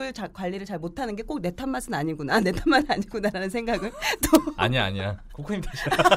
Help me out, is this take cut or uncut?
uncut